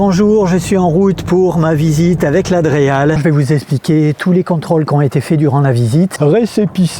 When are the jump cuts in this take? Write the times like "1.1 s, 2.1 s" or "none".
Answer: 3.2 s, 6.1 s